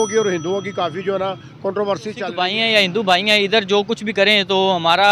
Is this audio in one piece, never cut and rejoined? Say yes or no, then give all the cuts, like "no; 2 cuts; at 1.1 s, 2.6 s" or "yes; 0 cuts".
no; 1 cut; at 2.3 s